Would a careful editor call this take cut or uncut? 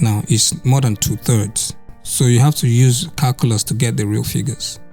uncut